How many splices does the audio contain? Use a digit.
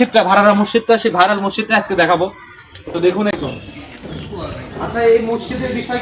1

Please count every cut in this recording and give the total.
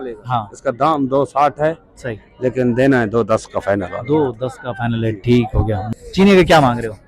1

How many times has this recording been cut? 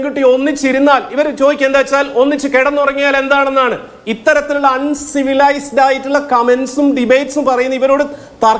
0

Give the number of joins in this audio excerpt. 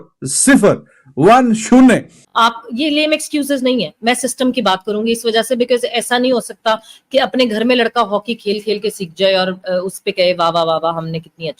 1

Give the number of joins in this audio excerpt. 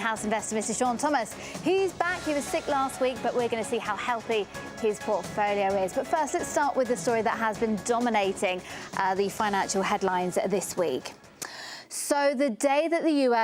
0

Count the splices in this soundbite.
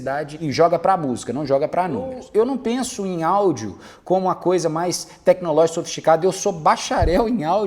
1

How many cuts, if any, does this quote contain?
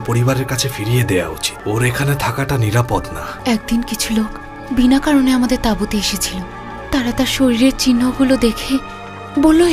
2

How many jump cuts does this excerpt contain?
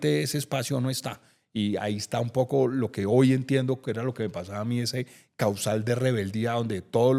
0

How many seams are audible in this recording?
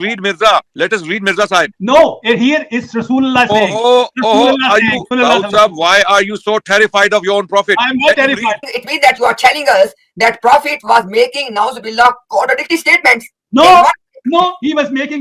2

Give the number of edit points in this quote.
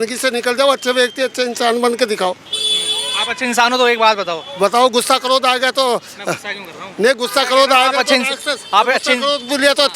0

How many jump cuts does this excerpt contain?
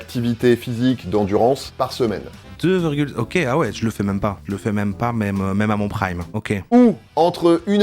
2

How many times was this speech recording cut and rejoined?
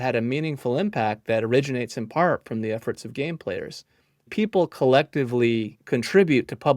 2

